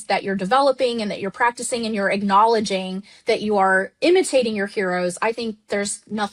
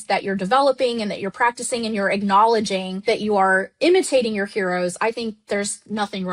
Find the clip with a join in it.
second; 1 cut; at 2.9 s

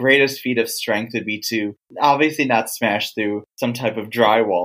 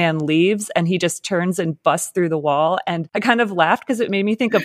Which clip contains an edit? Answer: second; 1 cut; at 3.1 s

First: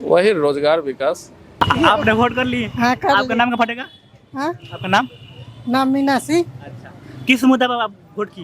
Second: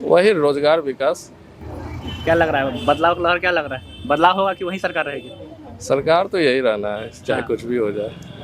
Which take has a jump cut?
first; 1 cut; at 1.6 s

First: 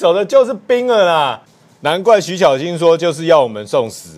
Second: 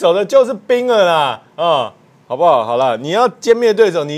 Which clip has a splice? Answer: first; 1 cut; at 1.4 s

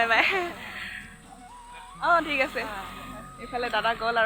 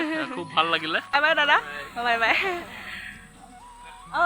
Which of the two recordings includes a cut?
second; 1 cut; at 1.1 s

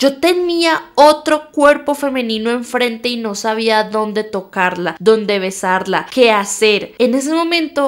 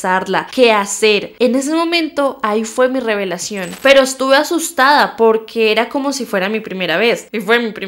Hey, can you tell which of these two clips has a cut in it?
second; 1 cut; at 3.8 s

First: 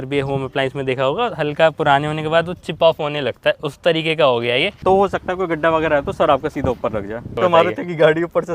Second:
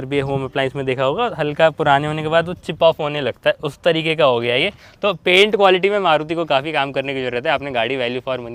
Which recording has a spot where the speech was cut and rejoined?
first; 2 cuts; at 4.8 s, 7.4 s

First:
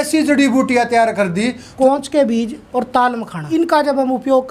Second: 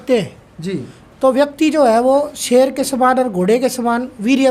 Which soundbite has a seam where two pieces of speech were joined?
first; 3 cuts; at 1.7 s, 2.6 s, 3.4 s

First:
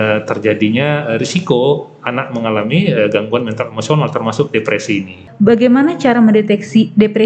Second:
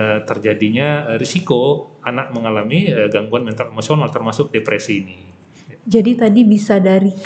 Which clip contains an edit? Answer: first; 1 cut; at 5.3 s

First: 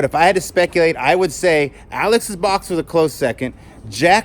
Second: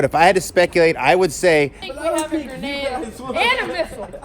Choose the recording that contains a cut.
second; 1 cut; at 1.8 s

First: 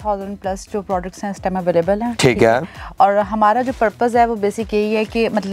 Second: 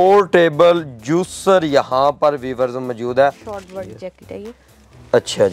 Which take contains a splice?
second; 1 cut; at 3.5 s

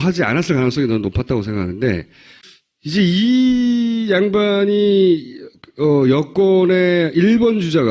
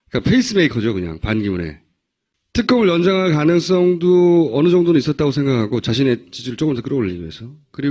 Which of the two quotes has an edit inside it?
second; 1 cut; at 3.8 s

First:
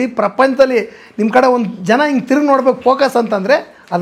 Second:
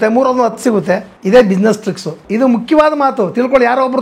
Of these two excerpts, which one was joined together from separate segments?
second; 2 cuts; at 1.1 s, 2.2 s

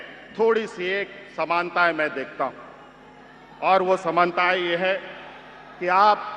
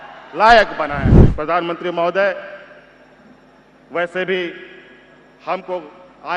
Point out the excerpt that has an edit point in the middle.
second; 1 cut; at 1.2 s

